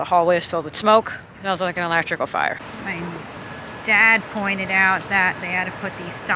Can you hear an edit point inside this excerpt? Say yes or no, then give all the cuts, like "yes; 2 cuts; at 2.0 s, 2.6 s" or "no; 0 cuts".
yes; 2 cuts; at 1.2 s, 2.7 s